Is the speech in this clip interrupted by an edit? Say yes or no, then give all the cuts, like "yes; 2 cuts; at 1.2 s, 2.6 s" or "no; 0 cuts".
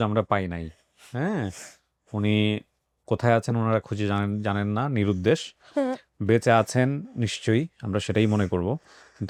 no; 0 cuts